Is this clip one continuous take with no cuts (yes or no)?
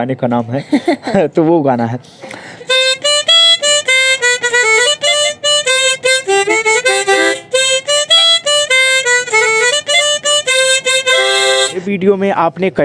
yes